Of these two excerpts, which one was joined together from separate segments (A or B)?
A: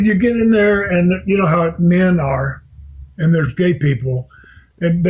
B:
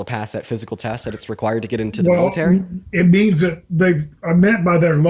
B